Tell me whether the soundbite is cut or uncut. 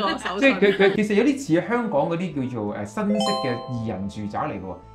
cut